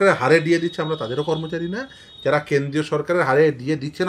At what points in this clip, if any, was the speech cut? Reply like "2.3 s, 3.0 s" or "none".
none